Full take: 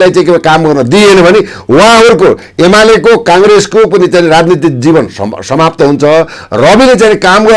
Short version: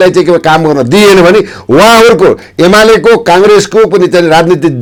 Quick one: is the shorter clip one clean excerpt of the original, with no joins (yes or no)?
yes